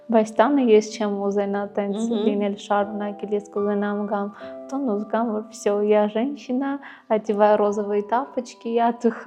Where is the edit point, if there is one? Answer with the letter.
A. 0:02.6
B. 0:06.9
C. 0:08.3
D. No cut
D